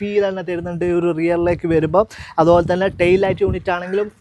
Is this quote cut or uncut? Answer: uncut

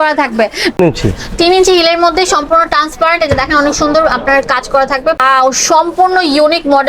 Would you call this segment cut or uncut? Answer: cut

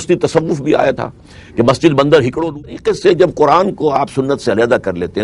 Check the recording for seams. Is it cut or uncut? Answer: cut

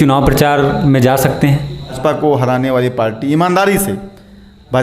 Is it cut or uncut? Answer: cut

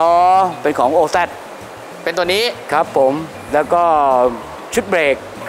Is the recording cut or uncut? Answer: uncut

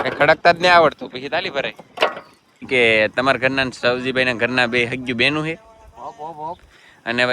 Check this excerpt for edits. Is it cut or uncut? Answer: cut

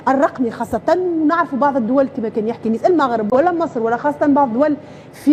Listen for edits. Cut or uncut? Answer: uncut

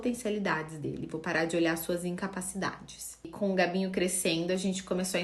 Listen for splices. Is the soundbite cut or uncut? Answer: cut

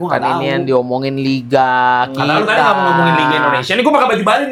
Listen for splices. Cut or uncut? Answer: uncut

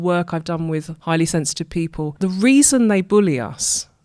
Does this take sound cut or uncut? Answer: cut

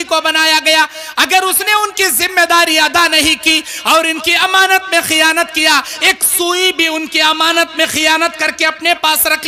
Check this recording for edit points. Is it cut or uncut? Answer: uncut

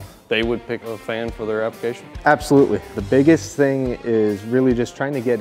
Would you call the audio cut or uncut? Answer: cut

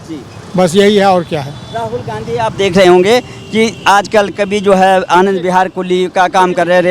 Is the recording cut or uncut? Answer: uncut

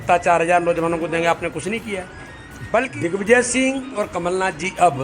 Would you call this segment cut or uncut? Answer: cut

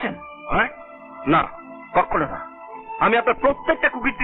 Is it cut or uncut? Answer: uncut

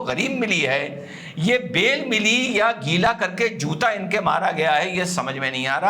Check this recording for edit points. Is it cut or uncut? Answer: uncut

